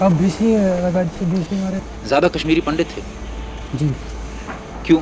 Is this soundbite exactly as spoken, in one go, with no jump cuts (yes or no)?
no